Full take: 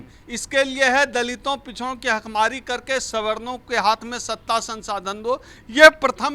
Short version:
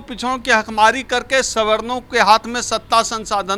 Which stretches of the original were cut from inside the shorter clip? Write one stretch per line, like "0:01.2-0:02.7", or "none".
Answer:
none

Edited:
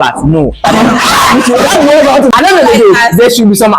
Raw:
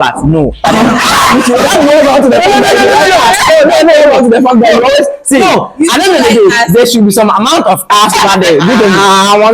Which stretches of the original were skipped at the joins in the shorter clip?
0:02.3-0:05.9

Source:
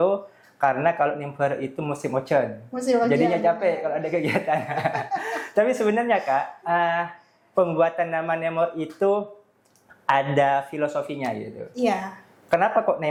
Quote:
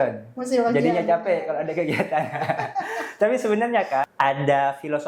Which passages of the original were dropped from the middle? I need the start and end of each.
0:06.5-0:10.0

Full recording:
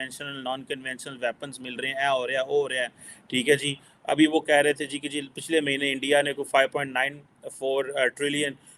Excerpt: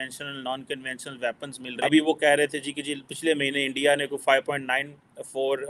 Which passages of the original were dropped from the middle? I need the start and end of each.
0:01.6-0:03.9

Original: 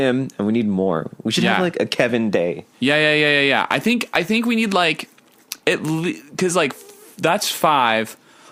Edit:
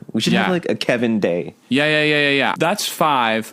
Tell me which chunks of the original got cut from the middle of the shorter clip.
0:03.6-0:07.2

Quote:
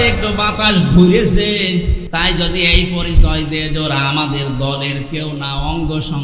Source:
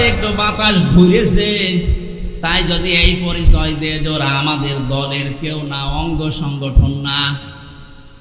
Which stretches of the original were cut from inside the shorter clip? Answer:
0:02.0-0:02.3

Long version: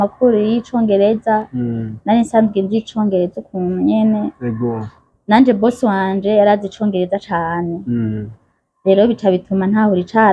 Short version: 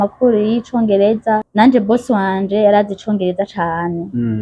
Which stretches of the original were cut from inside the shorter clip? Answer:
0:01.5-0:05.2

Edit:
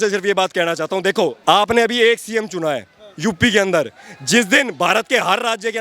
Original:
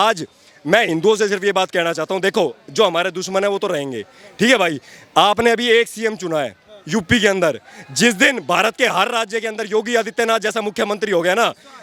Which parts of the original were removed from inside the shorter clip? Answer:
0:02.6-0:05.1

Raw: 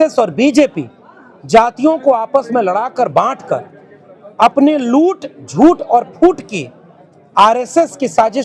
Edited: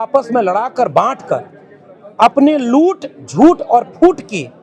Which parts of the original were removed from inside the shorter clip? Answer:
none

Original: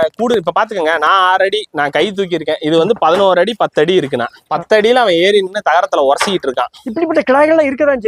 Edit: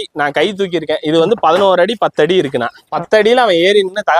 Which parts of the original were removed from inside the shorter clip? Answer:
none

